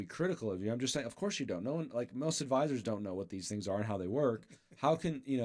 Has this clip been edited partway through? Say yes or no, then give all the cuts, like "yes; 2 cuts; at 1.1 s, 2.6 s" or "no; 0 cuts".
no; 0 cuts